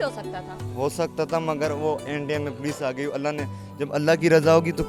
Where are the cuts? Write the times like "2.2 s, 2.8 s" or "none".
none